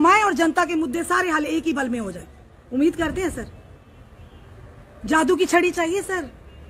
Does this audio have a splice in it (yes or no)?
no